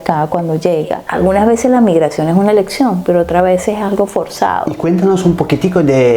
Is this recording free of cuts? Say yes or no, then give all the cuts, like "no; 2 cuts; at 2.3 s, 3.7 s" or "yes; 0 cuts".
no; 2 cuts; at 1.0 s, 4.7 s